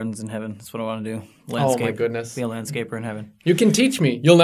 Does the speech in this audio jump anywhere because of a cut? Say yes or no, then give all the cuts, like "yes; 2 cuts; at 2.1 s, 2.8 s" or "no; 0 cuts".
no; 0 cuts